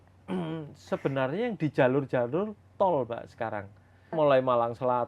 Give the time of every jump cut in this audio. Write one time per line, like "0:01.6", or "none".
0:04.1